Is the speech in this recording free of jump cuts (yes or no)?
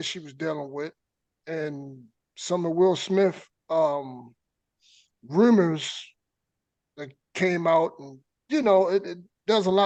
yes